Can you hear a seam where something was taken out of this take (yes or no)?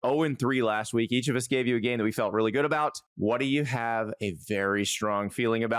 yes